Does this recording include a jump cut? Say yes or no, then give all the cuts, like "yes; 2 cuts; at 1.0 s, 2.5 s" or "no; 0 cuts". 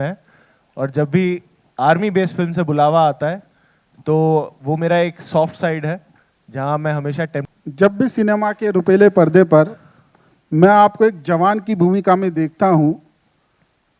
yes; 1 cut; at 7.4 s